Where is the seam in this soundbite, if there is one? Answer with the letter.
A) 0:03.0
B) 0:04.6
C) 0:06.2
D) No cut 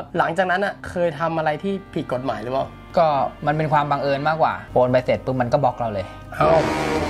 B